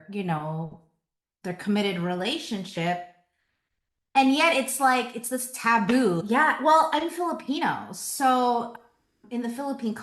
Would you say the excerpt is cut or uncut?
cut